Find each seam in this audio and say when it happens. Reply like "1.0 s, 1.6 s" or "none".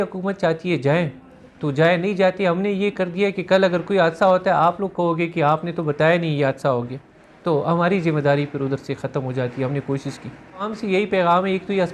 none